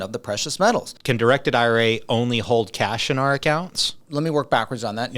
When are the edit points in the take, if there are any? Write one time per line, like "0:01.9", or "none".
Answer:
0:00.9
0:04.0